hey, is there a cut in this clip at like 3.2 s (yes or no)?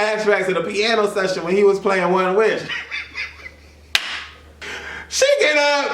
no